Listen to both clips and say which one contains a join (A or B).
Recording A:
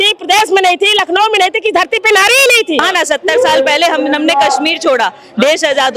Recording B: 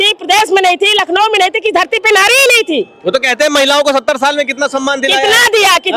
A